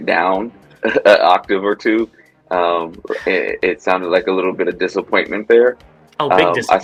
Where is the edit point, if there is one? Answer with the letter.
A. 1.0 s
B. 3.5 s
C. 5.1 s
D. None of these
D